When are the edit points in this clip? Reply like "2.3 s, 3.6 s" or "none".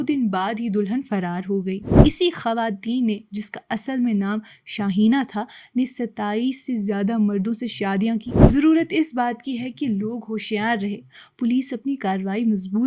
1.9 s, 8.3 s